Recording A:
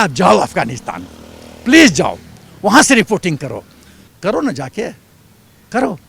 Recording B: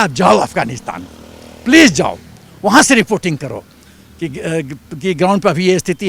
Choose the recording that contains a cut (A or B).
A